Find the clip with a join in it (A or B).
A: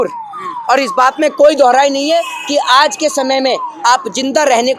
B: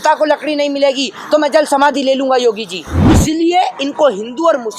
B